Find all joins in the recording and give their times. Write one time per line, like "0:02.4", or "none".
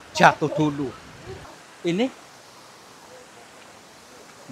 0:01.4